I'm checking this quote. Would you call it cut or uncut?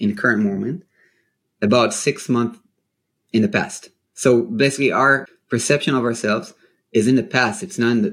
cut